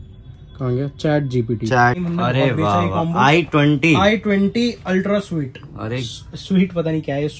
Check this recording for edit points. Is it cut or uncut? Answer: cut